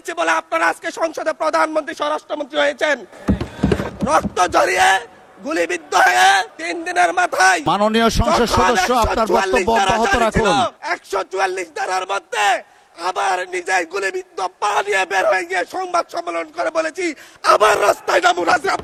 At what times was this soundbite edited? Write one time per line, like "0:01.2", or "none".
none